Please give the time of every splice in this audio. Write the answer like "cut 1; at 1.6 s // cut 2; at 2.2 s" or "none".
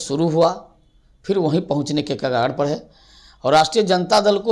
none

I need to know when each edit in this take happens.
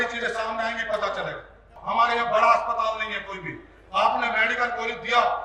cut 1; at 1.8 s

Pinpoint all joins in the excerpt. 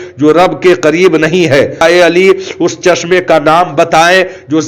cut 1; at 1.8 s

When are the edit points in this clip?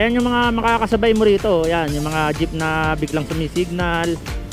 none

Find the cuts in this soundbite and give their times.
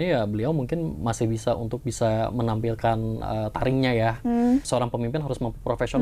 cut 1; at 4.7 s

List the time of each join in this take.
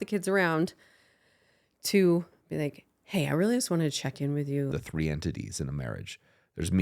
cut 1; at 4.7 s

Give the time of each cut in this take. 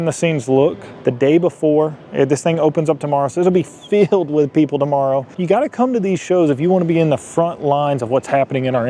cut 1; at 1.1 s // cut 2; at 5.3 s

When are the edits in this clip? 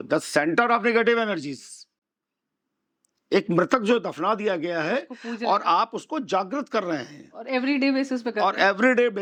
none

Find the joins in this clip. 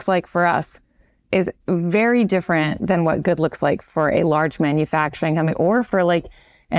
none

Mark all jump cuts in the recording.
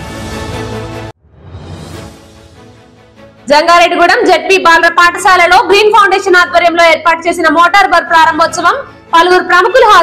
none

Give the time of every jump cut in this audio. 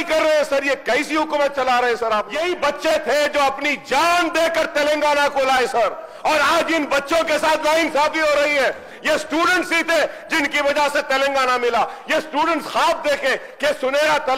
cut 1; at 2.3 s

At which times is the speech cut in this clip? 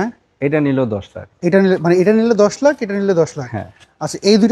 none

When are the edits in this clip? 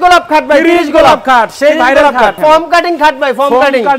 cut 1; at 2.4 s

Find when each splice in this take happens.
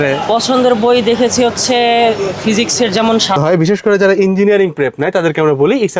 cut 1; at 3.4 s

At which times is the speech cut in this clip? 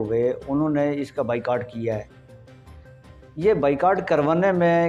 none

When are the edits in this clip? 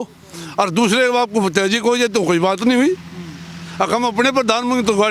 none

